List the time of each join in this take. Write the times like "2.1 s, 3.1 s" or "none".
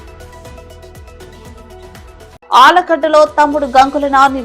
1.0 s